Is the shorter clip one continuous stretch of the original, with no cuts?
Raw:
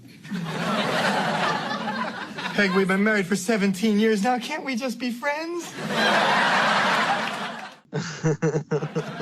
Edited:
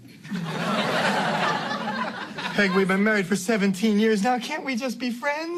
yes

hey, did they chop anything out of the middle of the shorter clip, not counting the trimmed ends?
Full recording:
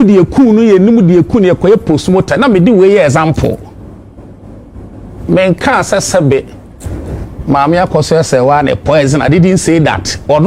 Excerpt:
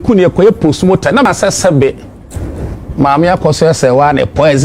yes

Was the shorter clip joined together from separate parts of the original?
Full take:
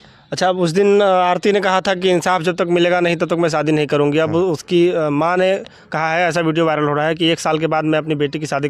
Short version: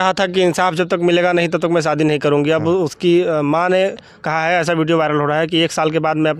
no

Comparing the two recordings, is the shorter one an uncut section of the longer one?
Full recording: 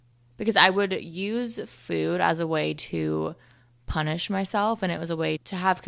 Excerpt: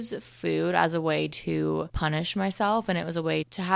no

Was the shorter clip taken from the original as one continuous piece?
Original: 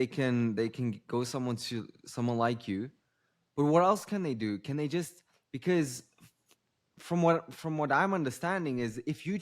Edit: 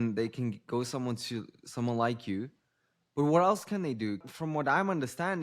no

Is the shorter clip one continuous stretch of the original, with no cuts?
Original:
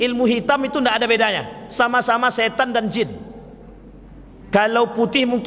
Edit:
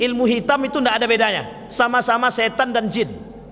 yes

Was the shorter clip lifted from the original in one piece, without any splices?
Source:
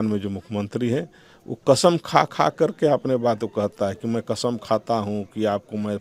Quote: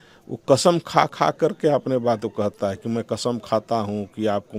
yes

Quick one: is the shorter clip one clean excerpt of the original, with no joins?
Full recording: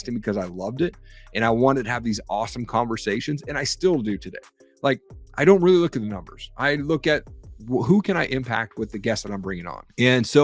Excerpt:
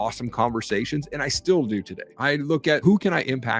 no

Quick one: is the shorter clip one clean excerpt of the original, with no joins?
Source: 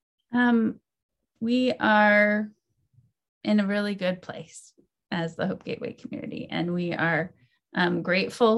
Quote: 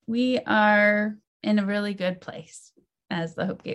no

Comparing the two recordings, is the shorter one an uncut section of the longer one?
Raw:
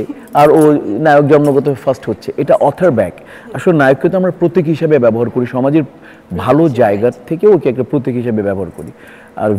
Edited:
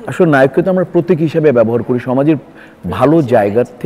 yes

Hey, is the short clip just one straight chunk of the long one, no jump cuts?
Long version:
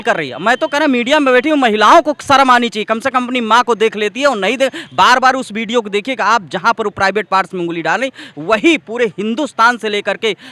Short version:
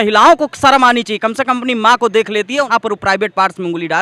no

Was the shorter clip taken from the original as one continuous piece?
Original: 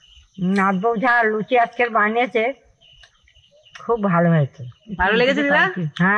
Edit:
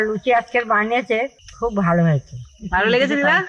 no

